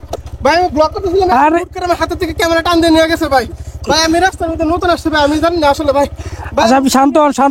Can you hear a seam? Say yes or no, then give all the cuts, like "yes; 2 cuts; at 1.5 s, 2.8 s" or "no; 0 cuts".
no; 0 cuts